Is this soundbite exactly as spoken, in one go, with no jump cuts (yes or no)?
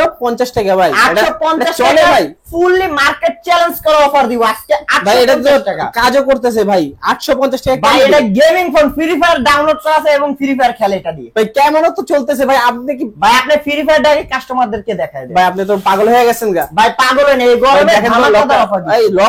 yes